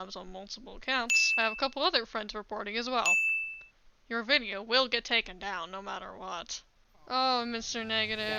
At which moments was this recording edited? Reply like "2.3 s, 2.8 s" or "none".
6.9 s